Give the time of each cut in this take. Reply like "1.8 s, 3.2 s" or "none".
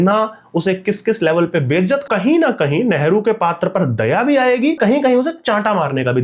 2.0 s, 4.8 s

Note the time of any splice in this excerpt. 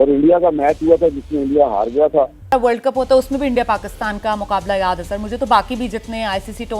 2.5 s

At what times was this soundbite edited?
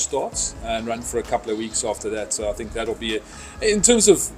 none

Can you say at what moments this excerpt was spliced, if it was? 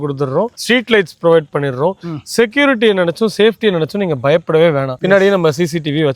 4.9 s

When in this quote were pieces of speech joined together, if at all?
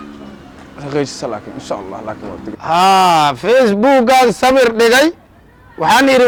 none

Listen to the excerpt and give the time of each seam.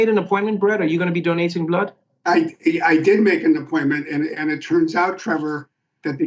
none

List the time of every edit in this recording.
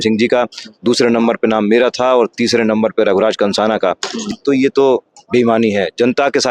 4.1 s

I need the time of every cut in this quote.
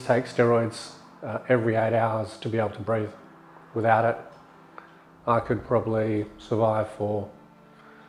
none

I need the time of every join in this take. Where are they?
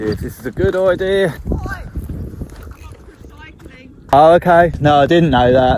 1.4 s, 4.1 s, 4.8 s

